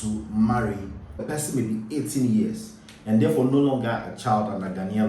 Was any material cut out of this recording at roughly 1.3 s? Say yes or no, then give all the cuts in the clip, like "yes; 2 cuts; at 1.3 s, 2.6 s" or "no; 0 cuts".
yes; 1 cut; at 1.3 s